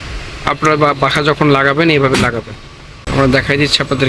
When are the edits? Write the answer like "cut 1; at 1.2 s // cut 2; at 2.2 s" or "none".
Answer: cut 1; at 3.0 s